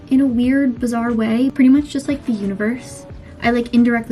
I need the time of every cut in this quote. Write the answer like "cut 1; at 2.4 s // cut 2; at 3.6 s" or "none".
cut 1; at 1.5 s